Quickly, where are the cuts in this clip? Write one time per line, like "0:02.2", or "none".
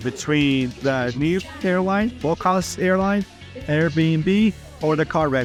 none